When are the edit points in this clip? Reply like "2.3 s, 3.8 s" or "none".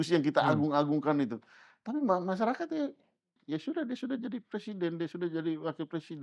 3.4 s